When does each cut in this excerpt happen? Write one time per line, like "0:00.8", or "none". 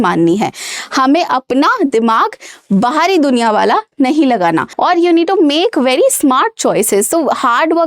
0:04.7